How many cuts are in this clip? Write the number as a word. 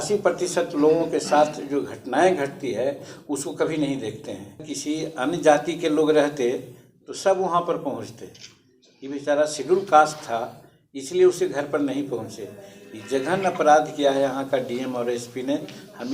one